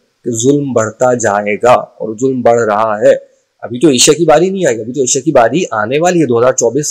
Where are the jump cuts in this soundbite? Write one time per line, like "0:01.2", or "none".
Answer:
none